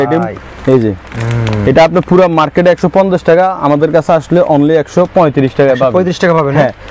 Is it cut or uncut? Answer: uncut